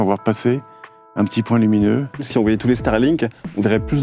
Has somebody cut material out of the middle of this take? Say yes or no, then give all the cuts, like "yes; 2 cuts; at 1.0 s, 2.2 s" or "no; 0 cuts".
yes; 1 cut; at 2.3 s